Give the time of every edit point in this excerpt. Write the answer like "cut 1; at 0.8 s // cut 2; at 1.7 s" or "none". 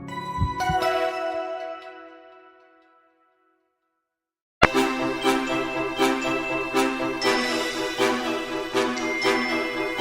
cut 1; at 4.7 s